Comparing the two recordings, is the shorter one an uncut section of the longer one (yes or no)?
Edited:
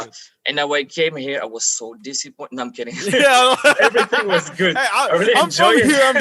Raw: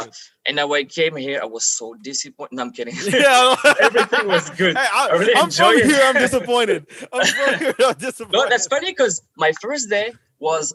yes